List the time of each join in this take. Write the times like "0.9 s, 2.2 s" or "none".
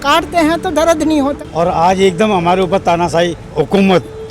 1.4 s, 3.4 s

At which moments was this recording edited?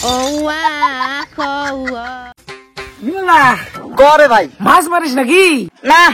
2.3 s

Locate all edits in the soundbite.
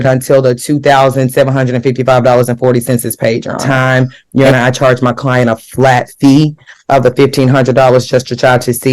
3.6 s

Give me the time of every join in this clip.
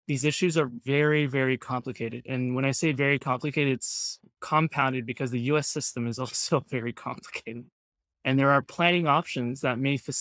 4.3 s

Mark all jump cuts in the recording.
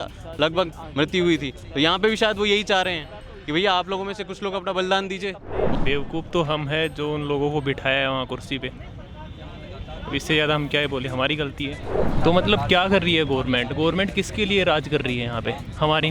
5.7 s, 12.2 s

